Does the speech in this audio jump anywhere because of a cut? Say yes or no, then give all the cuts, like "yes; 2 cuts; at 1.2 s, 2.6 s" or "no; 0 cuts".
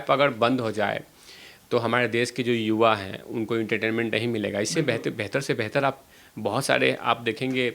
no; 0 cuts